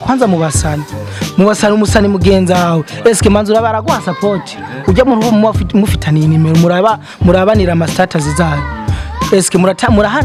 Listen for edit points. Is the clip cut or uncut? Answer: uncut